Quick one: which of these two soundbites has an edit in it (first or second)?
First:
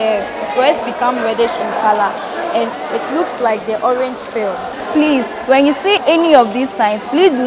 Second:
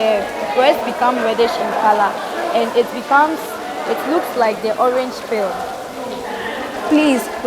first